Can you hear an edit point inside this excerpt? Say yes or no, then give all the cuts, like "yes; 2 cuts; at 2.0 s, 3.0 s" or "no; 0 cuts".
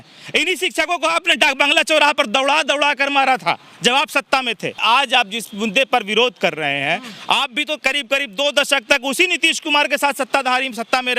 yes; 1 cut; at 4.8 s